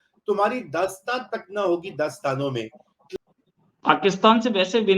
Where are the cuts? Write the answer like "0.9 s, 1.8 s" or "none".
2.9 s